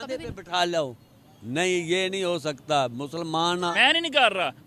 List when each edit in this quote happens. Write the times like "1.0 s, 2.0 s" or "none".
3.8 s